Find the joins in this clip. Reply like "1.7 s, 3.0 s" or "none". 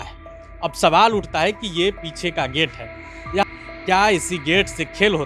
3.4 s